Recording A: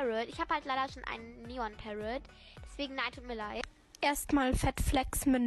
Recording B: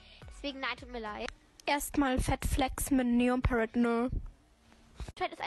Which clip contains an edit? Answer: B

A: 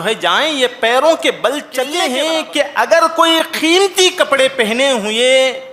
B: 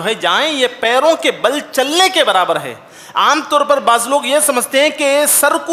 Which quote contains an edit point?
A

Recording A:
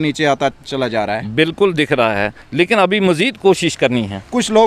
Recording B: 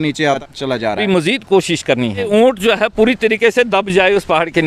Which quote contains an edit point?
B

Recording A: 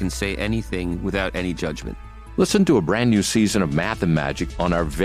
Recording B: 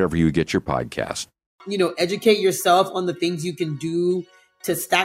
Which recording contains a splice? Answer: B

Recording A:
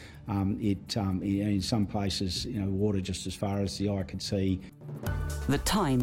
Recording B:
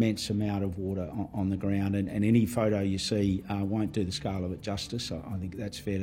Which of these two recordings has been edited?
A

